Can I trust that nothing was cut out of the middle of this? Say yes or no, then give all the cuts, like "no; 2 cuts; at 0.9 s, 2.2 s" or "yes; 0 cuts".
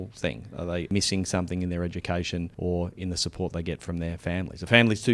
no; 2 cuts; at 0.9 s, 2.5 s